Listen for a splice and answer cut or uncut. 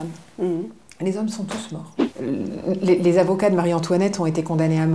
cut